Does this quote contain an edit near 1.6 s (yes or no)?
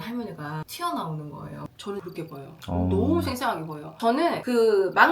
yes